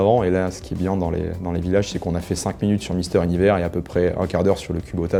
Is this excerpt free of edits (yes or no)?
yes